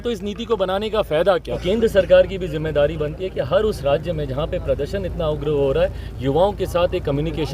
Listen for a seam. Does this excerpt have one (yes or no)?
yes